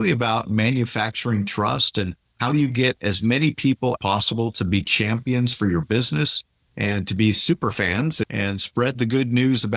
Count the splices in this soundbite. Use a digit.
1